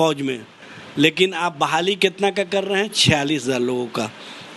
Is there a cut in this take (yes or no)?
no